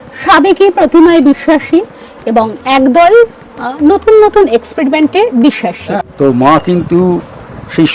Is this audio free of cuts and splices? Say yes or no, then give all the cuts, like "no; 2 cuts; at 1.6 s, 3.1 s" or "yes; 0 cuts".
no; 1 cut; at 6.1 s